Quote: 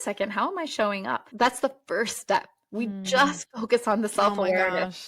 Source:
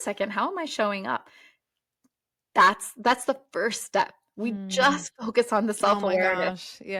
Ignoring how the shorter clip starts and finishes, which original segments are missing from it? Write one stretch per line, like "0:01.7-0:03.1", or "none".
0:01.3-0:02.9